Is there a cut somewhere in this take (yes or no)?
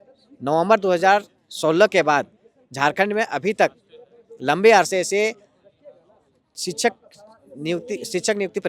no